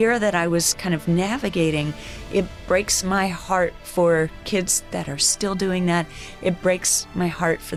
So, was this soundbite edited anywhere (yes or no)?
no